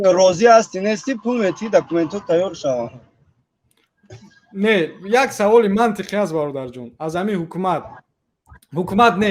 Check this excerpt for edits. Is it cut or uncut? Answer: uncut